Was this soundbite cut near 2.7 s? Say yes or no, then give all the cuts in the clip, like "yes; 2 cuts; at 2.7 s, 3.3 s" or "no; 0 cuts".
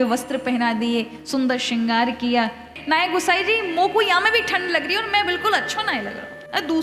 yes; 1 cut; at 2.7 s